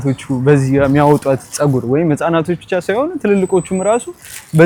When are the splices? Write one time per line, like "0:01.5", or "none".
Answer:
none